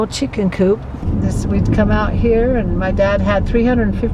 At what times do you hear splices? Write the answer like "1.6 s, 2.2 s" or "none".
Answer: 1.0 s